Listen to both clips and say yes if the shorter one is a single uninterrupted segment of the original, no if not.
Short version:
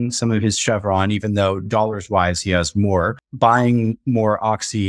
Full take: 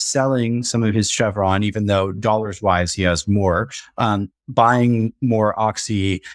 no